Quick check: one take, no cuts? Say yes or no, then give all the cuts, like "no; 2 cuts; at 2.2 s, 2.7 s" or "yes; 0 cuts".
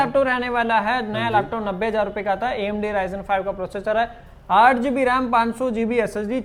yes; 0 cuts